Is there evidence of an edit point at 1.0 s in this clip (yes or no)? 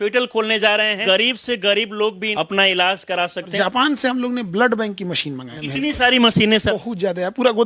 yes